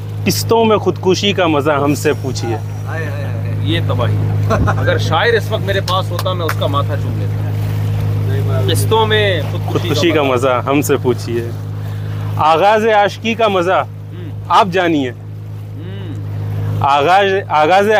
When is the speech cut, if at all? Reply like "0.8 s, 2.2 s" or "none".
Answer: none